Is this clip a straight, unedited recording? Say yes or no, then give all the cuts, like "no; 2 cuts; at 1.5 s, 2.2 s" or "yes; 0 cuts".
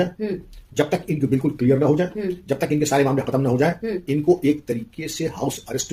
yes; 0 cuts